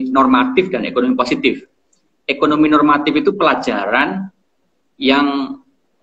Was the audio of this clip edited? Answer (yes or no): no